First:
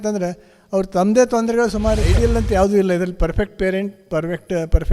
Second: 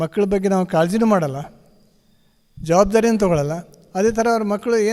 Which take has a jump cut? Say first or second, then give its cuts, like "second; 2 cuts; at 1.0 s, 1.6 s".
first; 1 cut; at 2.1 s